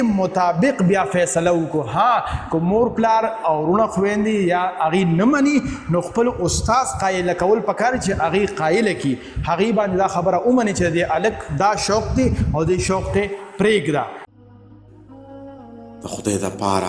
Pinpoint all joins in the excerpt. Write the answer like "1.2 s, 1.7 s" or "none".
14.3 s